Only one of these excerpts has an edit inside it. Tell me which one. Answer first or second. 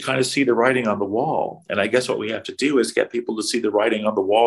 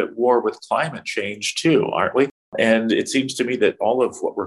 second